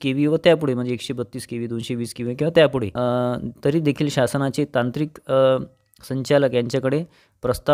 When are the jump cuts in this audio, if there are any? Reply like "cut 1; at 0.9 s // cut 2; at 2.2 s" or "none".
cut 1; at 2.9 s